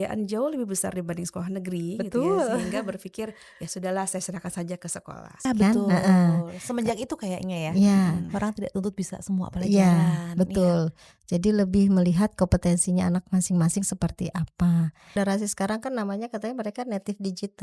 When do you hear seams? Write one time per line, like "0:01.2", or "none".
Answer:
0:05.4
0:15.1